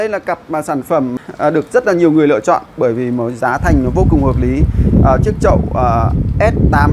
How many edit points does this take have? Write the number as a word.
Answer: one